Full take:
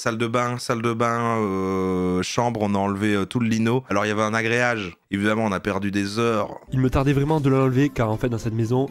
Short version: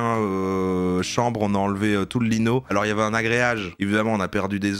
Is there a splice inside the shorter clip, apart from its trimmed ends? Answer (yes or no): yes